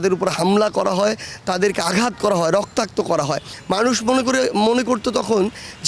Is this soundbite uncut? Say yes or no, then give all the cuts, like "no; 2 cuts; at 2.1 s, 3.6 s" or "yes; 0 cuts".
no; 1 cut; at 3.5 s